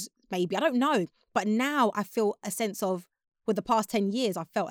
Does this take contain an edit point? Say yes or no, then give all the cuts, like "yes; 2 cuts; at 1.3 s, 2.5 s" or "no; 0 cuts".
no; 0 cuts